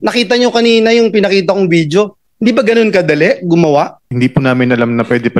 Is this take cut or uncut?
cut